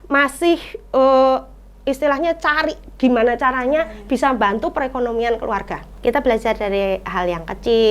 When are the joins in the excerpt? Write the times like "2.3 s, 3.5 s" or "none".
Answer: 5.8 s